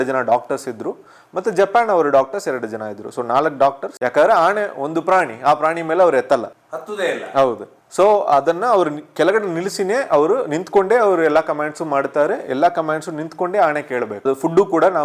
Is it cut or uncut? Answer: cut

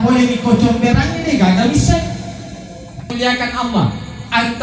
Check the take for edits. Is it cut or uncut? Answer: cut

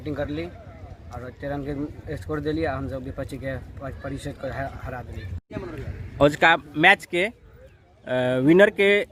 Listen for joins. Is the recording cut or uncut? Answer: uncut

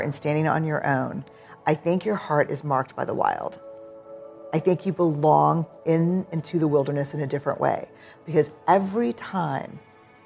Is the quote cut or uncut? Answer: uncut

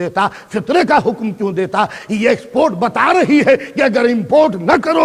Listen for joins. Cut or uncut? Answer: uncut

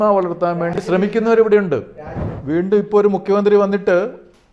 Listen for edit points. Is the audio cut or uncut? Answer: cut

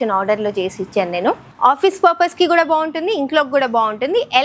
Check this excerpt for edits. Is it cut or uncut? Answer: cut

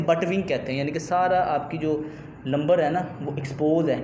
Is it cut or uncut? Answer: uncut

